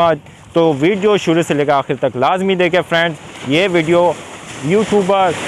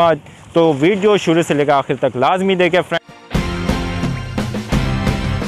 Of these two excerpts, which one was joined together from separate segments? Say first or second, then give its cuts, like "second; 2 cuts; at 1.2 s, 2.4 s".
second; 1 cut; at 2.9 s